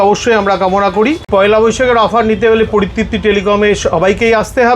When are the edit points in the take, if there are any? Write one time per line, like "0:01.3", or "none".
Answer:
0:01.2